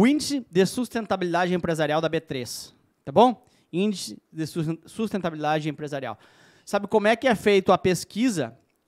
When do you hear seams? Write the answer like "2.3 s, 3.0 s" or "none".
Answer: none